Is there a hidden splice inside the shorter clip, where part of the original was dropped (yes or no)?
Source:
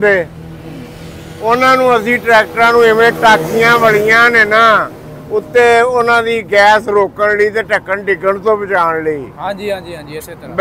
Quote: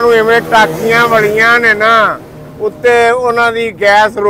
no